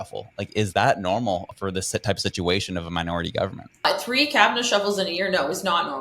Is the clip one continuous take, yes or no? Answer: no